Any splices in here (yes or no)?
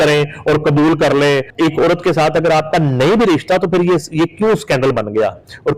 yes